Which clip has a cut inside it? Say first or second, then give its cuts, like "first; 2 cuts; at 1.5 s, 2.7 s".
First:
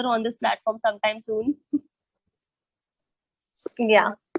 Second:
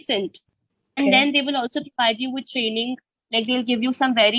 second; 1 cut; at 1.0 s